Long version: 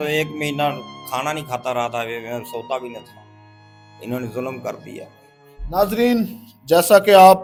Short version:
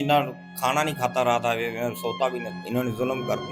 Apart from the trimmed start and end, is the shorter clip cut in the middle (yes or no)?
yes